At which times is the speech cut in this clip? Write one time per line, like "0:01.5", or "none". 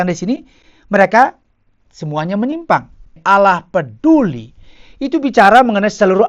0:03.1